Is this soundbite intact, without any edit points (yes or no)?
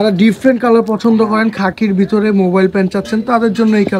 yes